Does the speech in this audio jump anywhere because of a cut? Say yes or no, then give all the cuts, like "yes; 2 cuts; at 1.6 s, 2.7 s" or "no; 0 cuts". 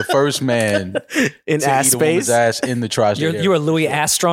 no; 0 cuts